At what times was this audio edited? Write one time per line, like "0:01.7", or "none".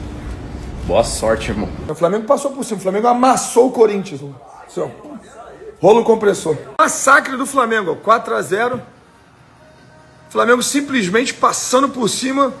0:01.9
0:06.8